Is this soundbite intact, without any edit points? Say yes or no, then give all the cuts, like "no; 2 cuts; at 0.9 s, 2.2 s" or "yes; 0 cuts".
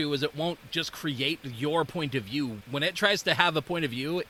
yes; 0 cuts